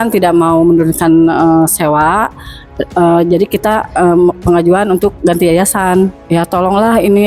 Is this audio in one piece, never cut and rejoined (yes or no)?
no